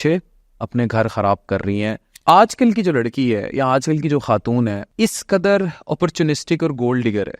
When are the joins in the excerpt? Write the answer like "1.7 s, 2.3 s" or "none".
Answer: 2.1 s, 4.9 s